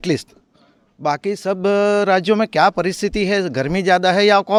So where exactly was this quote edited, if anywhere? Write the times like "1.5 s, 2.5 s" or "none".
none